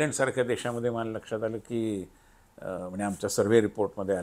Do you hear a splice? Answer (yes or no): no